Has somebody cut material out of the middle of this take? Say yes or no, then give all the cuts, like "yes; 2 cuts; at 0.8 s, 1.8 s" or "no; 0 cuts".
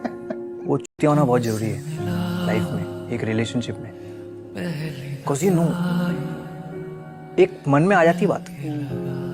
no; 0 cuts